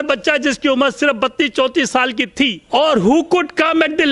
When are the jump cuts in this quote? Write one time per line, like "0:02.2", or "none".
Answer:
0:02.6